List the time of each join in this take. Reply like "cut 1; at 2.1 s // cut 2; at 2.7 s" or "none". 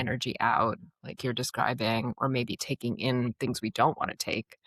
none